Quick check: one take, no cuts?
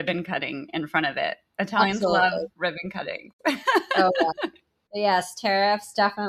yes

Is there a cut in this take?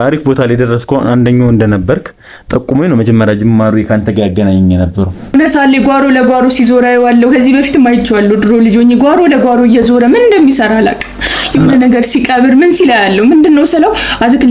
yes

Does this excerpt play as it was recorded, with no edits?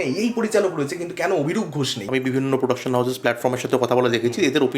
no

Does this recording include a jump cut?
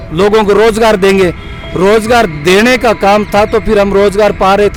no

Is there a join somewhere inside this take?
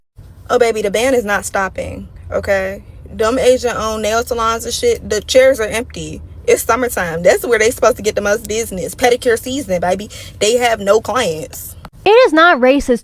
yes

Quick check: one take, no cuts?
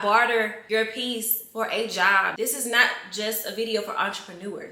no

